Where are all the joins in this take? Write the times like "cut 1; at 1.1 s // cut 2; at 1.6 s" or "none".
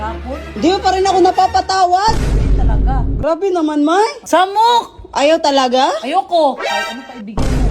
cut 1; at 4.2 s